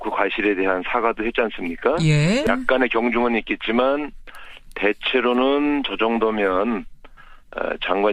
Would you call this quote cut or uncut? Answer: uncut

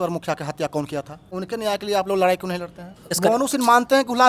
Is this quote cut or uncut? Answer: cut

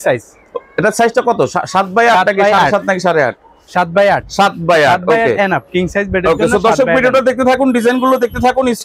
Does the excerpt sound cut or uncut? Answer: uncut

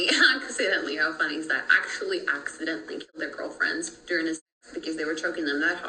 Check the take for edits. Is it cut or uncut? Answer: uncut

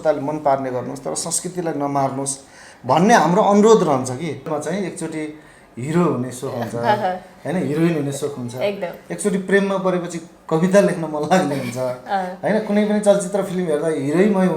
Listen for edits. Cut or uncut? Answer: cut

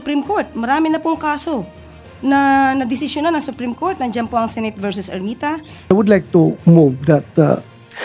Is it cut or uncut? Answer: cut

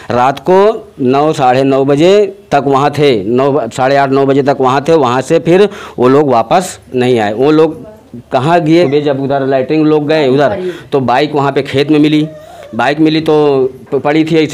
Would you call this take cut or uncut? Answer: cut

